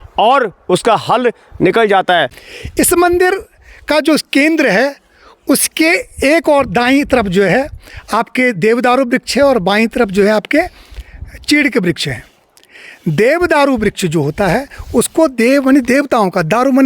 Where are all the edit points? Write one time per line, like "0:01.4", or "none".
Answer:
0:02.4